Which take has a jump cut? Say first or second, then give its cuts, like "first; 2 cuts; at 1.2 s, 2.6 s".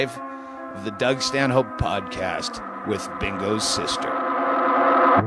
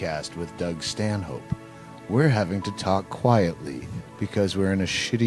first; 1 cut; at 3.0 s